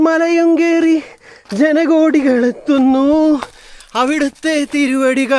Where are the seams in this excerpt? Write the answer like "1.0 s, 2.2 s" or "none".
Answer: none